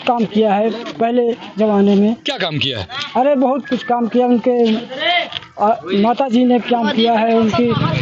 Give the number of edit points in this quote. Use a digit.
0